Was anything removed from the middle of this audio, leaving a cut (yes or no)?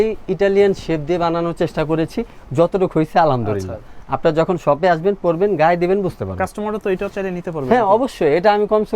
no